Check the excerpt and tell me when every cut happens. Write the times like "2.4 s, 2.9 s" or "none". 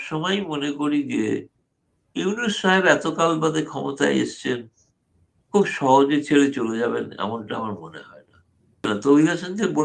8.9 s